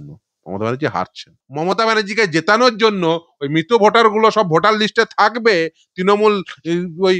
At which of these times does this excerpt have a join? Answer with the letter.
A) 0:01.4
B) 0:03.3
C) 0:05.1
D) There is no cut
A